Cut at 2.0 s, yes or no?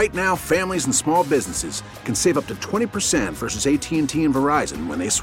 no